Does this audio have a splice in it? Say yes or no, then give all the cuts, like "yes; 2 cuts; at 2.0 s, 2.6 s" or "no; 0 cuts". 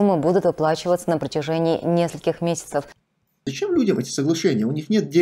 yes; 1 cut; at 3.5 s